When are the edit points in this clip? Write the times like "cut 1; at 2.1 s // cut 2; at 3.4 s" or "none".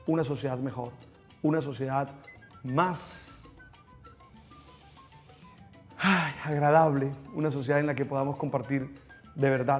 cut 1; at 8.7 s